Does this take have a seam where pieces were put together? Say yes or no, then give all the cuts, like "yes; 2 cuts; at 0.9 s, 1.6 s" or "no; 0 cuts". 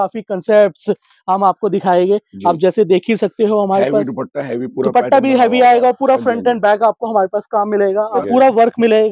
yes; 1 cut; at 8.2 s